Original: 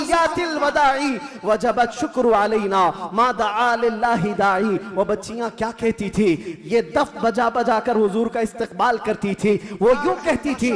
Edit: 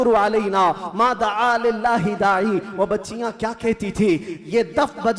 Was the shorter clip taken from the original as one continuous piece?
yes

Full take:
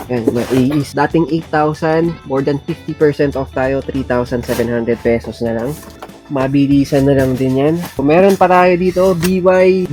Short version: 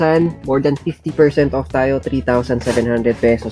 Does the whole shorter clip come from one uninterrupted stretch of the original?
yes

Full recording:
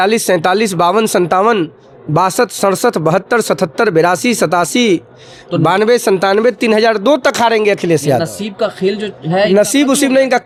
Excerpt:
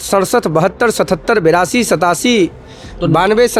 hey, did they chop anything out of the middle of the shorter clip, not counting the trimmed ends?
no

